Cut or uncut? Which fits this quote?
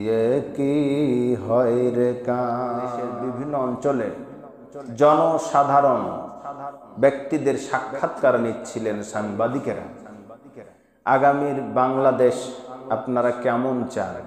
cut